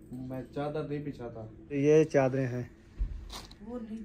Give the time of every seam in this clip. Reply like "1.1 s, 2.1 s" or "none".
1.8 s